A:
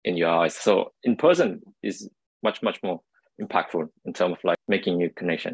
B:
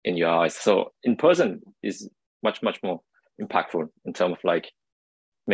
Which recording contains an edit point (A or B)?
A